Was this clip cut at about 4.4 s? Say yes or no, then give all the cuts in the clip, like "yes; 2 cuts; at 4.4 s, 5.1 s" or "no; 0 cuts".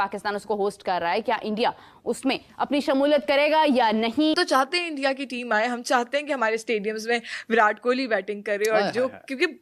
yes; 1 cut; at 4.4 s